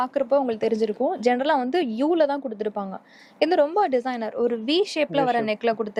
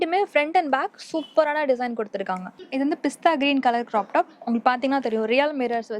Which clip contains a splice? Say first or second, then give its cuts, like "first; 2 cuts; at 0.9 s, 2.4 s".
second; 1 cut; at 2.6 s